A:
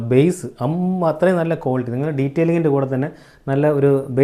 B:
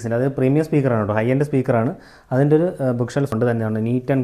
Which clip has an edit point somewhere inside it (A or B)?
B